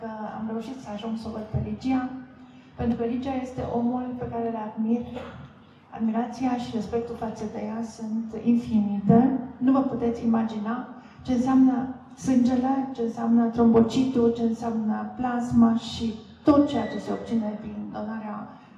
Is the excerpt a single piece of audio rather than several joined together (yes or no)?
yes